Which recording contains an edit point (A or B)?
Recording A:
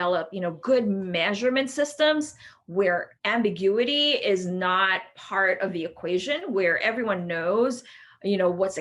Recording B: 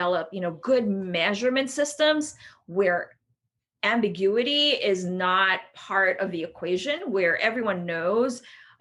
A